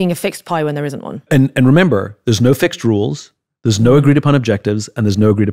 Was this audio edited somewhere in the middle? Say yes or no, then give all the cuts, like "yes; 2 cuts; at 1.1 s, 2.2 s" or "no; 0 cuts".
no; 0 cuts